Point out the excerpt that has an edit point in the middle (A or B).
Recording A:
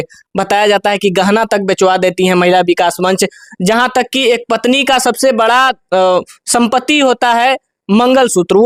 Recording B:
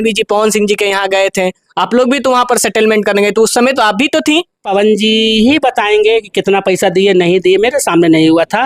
B